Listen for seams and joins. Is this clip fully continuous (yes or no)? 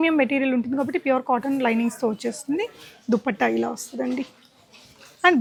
yes